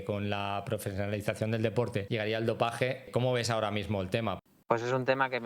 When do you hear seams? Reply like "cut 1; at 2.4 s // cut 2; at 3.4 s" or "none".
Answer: cut 1; at 4.4 s